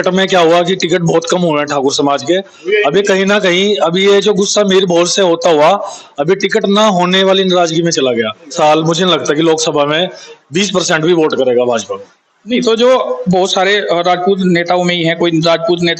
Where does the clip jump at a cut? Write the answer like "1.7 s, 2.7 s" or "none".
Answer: 8.5 s